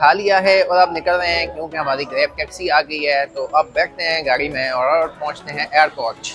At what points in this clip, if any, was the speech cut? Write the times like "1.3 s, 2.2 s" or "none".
none